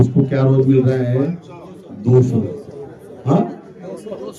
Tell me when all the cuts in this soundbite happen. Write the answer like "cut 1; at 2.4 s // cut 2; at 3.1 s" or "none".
none